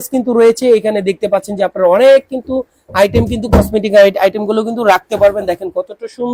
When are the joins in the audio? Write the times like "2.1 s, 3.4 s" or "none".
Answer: none